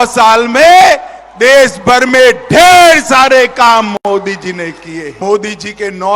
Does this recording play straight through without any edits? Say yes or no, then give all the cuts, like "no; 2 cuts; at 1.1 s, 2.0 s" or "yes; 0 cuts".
no; 1 cut; at 5.2 s